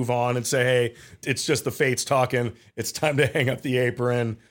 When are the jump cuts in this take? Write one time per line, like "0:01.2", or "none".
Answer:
0:01.3